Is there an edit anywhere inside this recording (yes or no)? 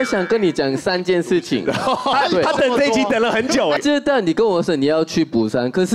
yes